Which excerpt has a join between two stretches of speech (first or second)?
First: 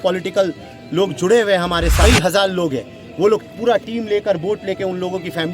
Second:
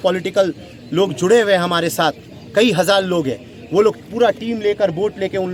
first